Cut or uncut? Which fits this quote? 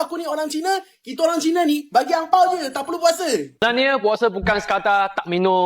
cut